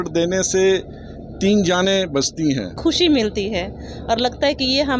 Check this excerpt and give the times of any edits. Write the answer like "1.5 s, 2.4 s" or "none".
2.8 s